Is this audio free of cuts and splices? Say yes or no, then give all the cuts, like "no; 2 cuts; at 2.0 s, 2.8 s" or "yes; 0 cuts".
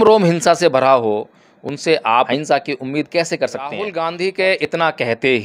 no; 2 cuts; at 2.3 s, 3.8 s